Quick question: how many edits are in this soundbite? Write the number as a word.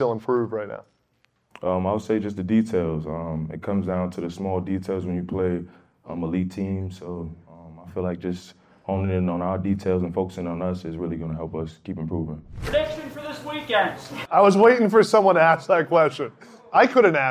two